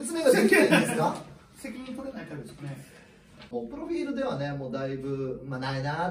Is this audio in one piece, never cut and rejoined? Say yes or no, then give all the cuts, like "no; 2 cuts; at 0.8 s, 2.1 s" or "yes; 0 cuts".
no; 1 cut; at 3.5 s